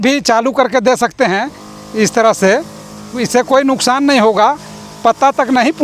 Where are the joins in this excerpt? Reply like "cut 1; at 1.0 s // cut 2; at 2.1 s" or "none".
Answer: none